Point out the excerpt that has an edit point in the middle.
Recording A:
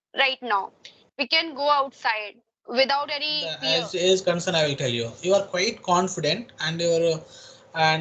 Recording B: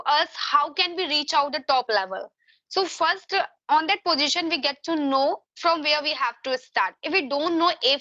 A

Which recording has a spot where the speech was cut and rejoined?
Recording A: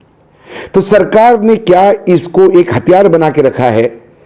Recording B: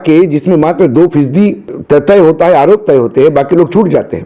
B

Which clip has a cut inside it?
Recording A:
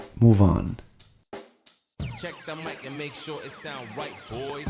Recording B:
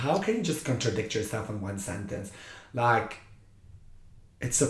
A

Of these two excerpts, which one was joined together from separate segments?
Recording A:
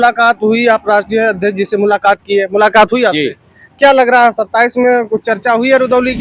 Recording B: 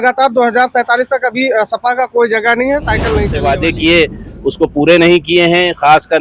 B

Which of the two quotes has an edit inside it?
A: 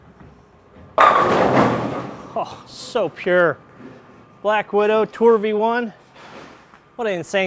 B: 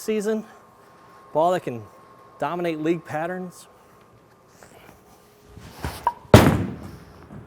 B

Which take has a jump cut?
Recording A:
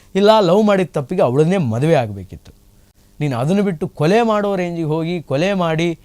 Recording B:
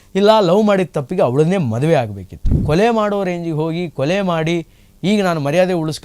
B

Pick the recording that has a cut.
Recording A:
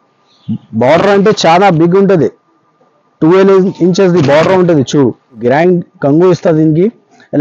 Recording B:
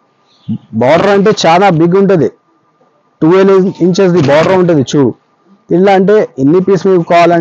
A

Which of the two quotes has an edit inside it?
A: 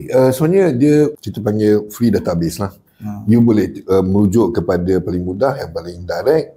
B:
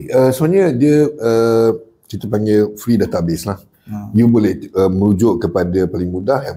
A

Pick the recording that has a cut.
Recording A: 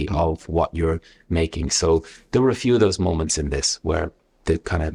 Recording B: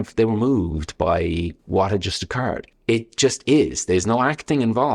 B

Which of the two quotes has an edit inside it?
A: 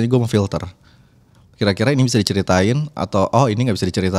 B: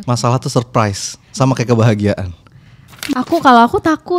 B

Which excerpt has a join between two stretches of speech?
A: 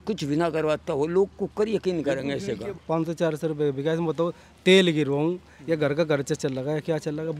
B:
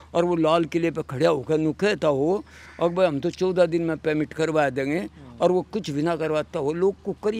A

